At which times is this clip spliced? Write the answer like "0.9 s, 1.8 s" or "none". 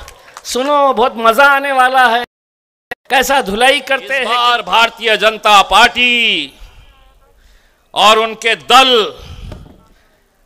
4.3 s